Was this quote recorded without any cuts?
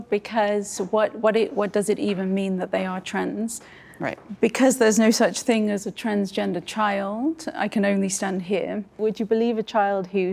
no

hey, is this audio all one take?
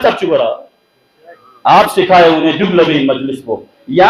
yes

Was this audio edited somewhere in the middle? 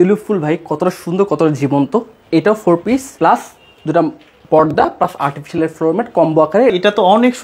yes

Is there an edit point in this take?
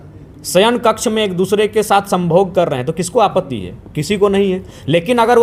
no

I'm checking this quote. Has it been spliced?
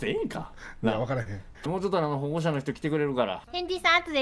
yes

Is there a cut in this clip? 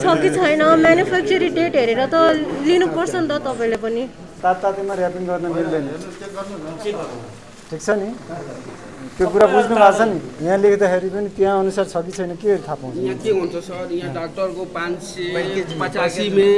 yes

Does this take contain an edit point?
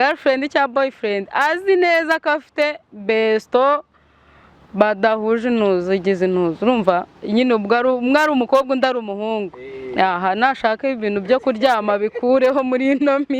no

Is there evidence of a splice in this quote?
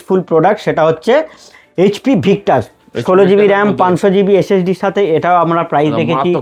no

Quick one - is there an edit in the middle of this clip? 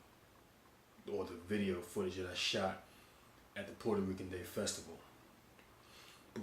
yes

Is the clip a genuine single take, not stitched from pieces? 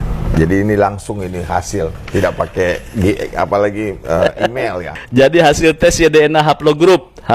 no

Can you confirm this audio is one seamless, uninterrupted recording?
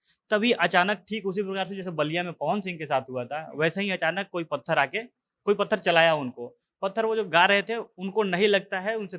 yes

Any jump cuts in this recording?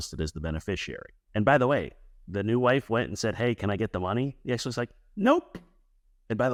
no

